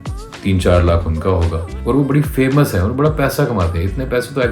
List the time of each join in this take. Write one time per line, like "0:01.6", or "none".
0:01.7